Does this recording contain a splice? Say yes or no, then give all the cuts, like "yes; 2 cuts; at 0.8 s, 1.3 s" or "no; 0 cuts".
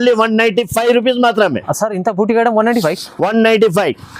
no; 0 cuts